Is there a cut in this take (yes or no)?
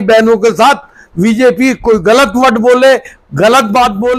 no